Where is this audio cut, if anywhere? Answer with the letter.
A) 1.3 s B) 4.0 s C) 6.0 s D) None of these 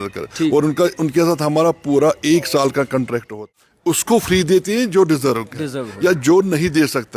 B